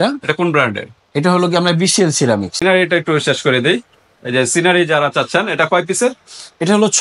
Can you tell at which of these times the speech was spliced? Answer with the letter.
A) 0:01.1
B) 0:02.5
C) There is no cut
B